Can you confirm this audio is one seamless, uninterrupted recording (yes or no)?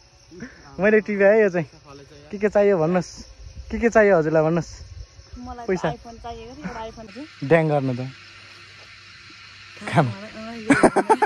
no